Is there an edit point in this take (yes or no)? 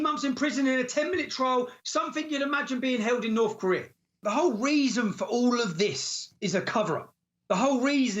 yes